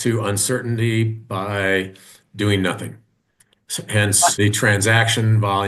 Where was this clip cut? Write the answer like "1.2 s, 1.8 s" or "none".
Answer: 4.3 s